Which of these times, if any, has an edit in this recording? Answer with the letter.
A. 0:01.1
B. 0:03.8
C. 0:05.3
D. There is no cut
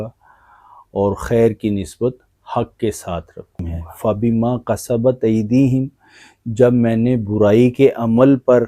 B